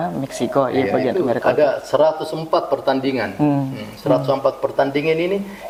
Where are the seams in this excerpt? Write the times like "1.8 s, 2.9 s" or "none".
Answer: none